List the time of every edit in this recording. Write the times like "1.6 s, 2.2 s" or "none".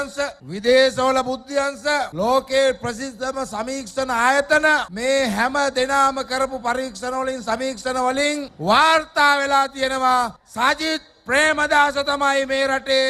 none